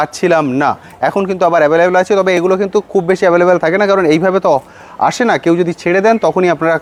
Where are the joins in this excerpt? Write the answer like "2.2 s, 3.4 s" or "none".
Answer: none